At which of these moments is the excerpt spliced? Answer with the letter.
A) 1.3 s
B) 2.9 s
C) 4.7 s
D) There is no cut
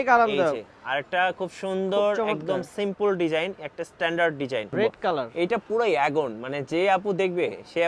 C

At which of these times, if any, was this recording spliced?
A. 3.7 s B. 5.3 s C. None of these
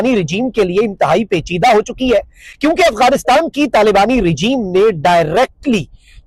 C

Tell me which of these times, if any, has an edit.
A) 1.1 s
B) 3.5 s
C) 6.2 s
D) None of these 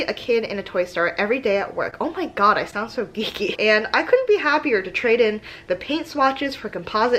B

